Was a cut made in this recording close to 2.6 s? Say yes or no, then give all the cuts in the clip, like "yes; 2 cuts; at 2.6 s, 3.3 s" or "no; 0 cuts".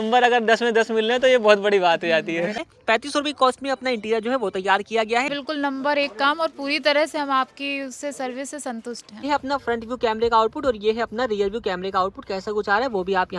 yes; 3 cuts; at 2.6 s, 5.3 s, 9.2 s